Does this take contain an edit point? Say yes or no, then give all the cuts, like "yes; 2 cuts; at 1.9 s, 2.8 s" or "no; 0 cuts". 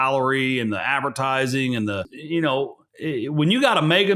yes; 2 cuts; at 2.1 s, 2.8 s